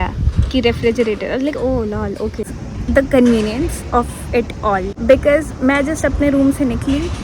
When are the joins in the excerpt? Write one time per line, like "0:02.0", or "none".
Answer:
0:02.6
0:04.9